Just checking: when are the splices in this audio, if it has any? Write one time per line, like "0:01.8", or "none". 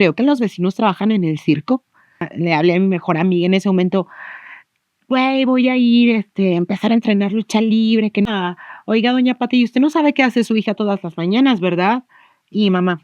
0:02.3
0:08.3